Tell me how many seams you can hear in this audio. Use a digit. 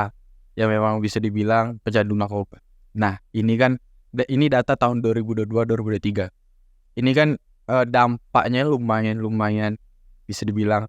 0